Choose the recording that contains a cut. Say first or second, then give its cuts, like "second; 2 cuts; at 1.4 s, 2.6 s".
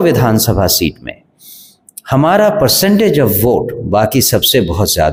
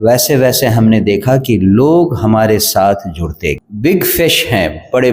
second; 1 cut; at 3.7 s